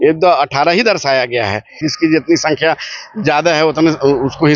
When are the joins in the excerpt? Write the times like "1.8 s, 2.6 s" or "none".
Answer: 1.8 s